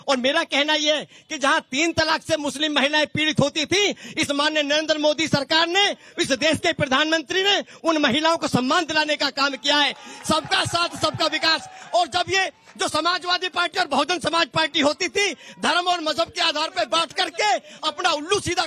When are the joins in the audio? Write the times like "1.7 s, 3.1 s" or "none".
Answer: 16.7 s